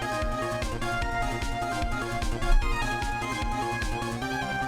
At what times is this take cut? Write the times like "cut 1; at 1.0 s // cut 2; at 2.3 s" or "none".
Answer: none